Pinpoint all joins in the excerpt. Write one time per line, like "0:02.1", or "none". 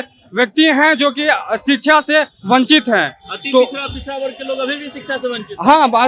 none